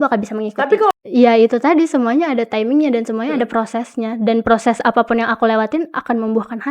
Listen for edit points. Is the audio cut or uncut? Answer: cut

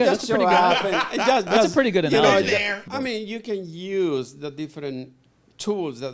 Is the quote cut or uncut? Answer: cut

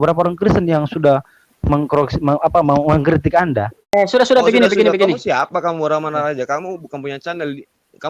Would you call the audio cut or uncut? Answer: cut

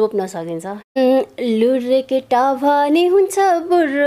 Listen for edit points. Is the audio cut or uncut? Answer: cut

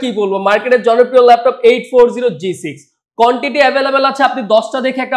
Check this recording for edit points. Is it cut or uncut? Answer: uncut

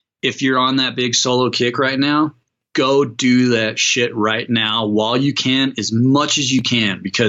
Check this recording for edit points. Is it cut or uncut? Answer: uncut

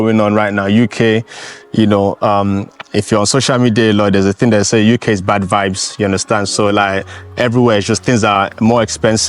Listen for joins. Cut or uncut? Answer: uncut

